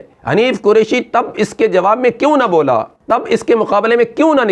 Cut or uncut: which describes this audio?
cut